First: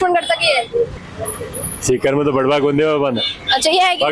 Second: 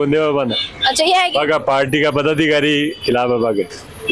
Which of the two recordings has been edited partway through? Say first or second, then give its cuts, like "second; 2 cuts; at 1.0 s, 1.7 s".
first; 1 cut; at 1.0 s